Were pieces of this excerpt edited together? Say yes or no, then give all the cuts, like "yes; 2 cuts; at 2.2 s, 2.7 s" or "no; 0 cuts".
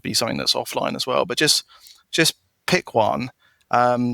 no; 0 cuts